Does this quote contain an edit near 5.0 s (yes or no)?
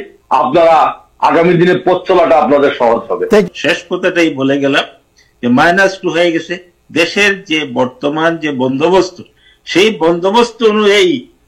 no